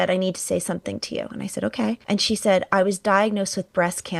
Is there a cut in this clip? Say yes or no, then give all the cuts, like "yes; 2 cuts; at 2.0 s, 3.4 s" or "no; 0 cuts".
yes; 1 cut; at 2.0 s